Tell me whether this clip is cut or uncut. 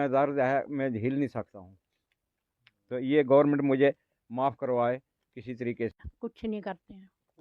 cut